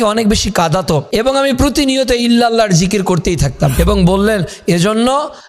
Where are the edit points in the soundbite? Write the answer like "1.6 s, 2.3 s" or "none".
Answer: 1.1 s, 3.8 s